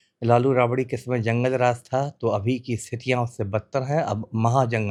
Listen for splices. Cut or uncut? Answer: uncut